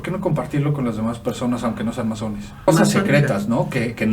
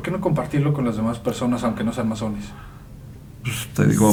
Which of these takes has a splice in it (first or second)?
first